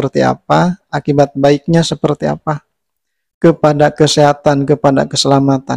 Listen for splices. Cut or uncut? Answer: uncut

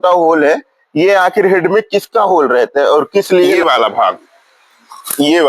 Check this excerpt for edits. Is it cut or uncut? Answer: cut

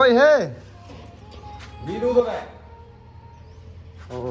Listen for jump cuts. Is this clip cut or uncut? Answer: uncut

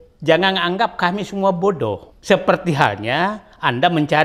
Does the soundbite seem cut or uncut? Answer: cut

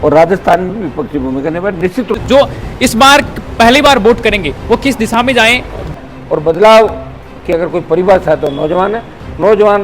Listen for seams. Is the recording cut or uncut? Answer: cut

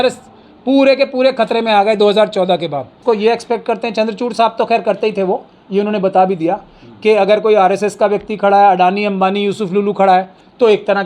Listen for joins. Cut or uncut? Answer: cut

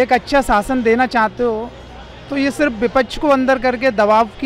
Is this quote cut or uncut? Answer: uncut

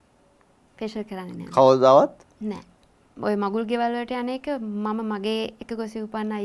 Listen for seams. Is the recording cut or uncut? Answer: cut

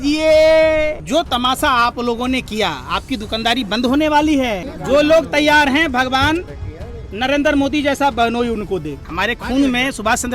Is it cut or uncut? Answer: cut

